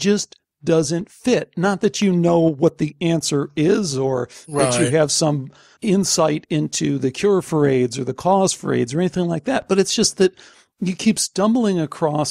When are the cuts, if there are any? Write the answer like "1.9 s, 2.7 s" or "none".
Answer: none